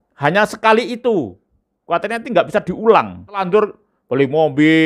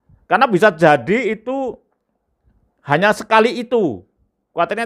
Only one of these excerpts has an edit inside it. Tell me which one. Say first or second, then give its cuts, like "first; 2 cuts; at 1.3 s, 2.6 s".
first; 1 cut; at 3.5 s